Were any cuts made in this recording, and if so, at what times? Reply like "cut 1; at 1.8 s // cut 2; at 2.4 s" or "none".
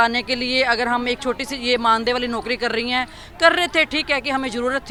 none